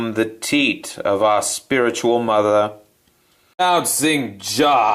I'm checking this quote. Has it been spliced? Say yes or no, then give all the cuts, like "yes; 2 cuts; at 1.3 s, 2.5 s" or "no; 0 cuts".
yes; 1 cut; at 4.0 s